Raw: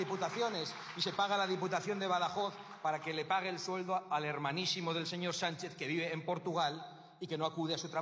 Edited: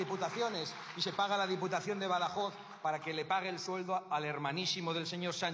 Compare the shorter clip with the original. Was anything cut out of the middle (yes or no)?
no